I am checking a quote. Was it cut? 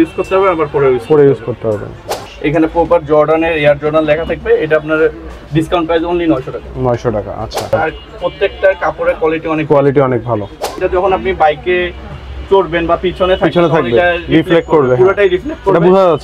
yes; 3 cuts; at 2.2 s, 7.7 s, 10.8 s

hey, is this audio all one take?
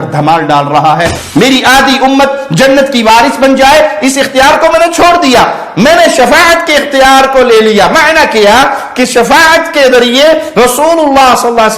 no; 1 cut; at 1.2 s

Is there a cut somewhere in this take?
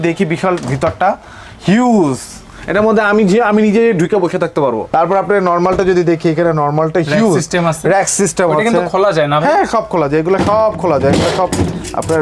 no; 0 cuts

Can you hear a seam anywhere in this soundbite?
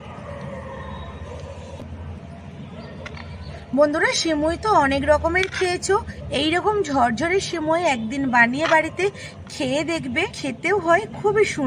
yes; 2 cuts; at 6.2 s, 10.4 s

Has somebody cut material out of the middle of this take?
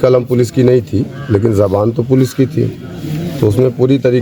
no; 0 cuts

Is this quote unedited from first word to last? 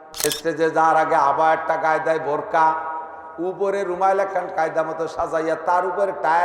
yes; 0 cuts

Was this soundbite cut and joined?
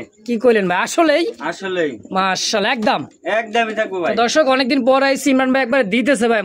no; 0 cuts

